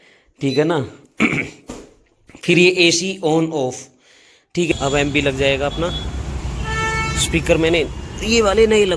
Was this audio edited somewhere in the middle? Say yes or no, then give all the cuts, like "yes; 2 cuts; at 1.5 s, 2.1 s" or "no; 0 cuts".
yes; 1 cut; at 4.7 s